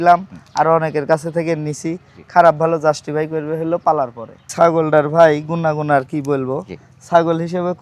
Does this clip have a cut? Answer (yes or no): yes